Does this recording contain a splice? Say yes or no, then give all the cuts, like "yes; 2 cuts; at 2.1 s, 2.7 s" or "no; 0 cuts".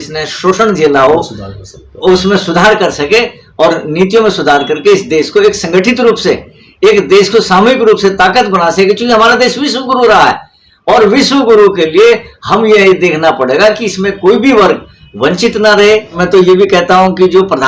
yes; 1 cut; at 16.2 s